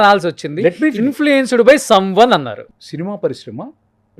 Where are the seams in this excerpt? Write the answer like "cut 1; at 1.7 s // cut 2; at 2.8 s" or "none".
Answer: cut 1; at 2.7 s